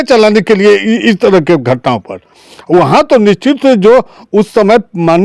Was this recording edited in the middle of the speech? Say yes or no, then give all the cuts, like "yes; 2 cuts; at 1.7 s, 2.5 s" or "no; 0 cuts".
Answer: no; 0 cuts